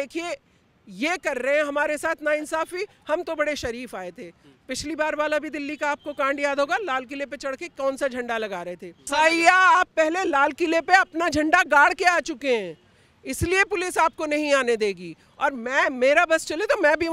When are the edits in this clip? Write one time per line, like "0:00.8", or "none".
0:09.1